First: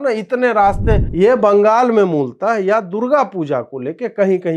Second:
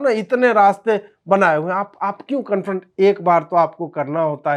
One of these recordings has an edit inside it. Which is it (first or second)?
first